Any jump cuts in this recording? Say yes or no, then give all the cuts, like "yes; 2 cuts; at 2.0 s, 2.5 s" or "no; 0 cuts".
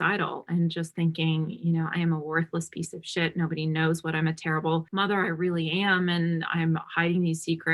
yes; 1 cut; at 4.9 s